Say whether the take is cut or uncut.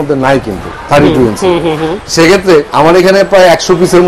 cut